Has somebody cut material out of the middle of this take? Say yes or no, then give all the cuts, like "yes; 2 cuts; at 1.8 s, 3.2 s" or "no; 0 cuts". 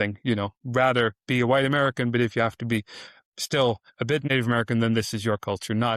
yes; 1 cut; at 4.3 s